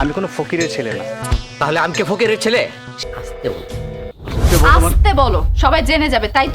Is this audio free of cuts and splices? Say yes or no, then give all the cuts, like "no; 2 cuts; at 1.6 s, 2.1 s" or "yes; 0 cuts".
no; 2 cuts; at 1.2 s, 3.0 s